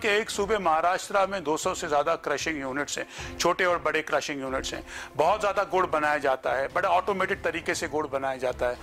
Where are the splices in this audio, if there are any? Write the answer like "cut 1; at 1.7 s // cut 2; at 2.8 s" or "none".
none

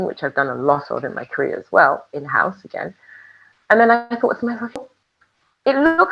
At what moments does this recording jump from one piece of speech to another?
cut 1; at 4.8 s

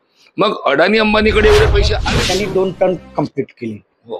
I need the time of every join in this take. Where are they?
cut 1; at 2.1 s

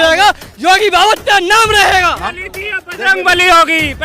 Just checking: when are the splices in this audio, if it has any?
cut 1; at 2.3 s

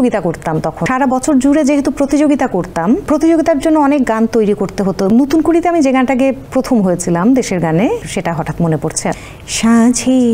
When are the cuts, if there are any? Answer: cut 1; at 0.8 s // cut 2; at 3.0 s // cut 3; at 5.1 s // cut 4; at 6.4 s // cut 5; at 8.1 s // cut 6; at 9.2 s

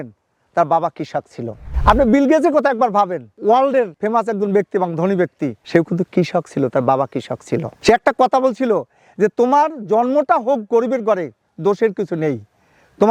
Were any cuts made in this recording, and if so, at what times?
none

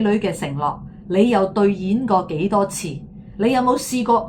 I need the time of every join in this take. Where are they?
none

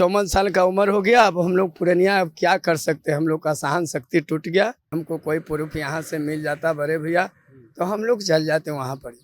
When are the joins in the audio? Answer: cut 1; at 4.8 s

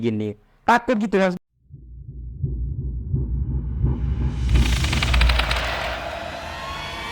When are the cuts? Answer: cut 1; at 1.4 s

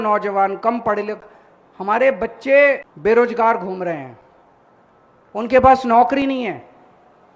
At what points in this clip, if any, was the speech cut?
cut 1; at 2.9 s

